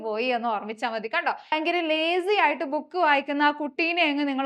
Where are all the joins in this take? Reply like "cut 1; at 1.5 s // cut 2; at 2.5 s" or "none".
cut 1; at 1.5 s